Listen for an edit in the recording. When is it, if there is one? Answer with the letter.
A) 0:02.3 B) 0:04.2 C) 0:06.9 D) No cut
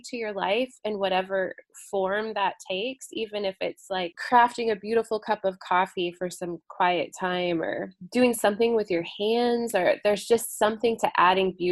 B